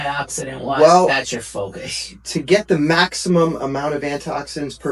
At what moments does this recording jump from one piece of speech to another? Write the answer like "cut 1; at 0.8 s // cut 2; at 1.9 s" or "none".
none